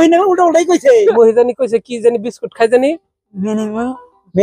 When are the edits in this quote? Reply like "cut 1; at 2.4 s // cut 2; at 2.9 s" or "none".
cut 1; at 1.1 s